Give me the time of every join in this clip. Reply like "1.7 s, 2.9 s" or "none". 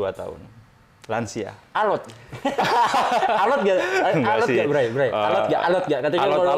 none